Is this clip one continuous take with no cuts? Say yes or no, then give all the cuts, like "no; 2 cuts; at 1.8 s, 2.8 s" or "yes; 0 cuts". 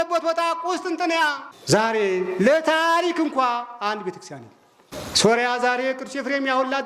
no; 2 cuts; at 1.5 s, 4.9 s